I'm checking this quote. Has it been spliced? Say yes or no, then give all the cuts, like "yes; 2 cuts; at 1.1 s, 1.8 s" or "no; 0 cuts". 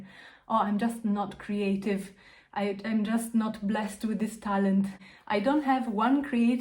yes; 1 cut; at 5.0 s